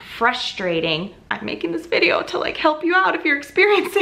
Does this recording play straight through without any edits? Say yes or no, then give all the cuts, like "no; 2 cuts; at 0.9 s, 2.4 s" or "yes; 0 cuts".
no; 1 cut; at 1.3 s